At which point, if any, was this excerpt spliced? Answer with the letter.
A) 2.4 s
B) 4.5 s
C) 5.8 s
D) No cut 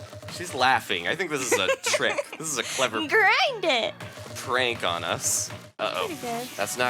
C